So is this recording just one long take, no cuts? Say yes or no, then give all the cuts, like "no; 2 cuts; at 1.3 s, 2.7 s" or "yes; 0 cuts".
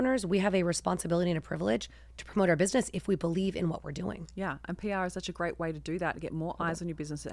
yes; 0 cuts